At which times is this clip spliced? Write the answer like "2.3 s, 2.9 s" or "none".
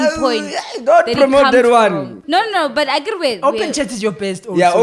2.2 s